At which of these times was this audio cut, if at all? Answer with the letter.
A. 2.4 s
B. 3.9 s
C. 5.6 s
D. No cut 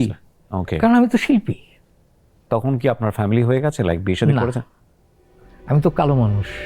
A